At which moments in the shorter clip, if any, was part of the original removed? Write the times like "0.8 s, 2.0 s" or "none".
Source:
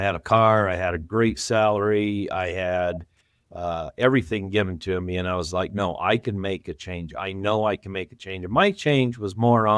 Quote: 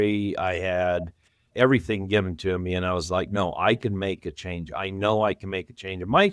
1.5 s